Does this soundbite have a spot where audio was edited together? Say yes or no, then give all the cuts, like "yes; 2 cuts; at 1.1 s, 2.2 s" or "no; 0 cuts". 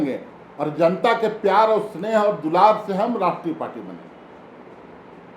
no; 0 cuts